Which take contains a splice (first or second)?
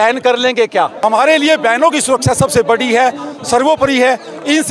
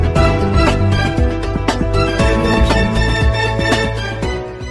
first